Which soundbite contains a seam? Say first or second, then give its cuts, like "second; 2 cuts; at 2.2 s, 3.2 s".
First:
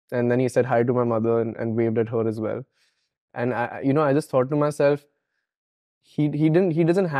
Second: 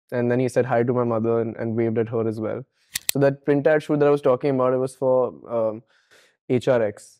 second; 1 cut; at 3.0 s